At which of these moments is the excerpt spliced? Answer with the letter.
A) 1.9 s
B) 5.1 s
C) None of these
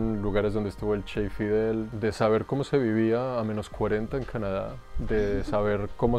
A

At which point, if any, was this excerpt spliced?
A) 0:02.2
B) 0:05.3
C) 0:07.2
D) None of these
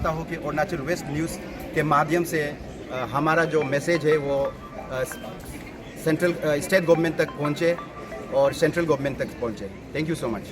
D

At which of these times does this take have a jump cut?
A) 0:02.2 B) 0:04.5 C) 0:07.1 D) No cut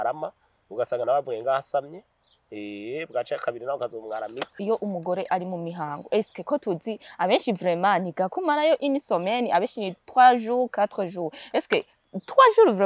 B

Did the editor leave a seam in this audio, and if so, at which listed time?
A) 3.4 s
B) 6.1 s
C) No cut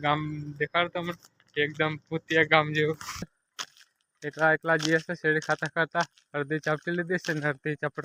A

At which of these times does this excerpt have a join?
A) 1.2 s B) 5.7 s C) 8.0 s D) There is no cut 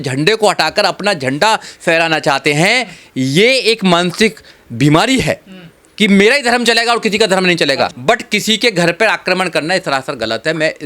C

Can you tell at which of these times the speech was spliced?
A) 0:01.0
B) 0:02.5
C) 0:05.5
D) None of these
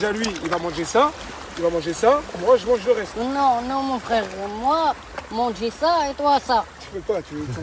D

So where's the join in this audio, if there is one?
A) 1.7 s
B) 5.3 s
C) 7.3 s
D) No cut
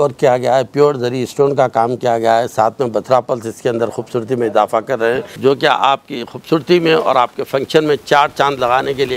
B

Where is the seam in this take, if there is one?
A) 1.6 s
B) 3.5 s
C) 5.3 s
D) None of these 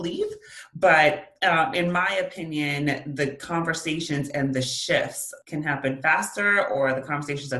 C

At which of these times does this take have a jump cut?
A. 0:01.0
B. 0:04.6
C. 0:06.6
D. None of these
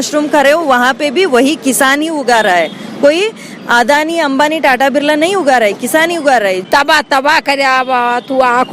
C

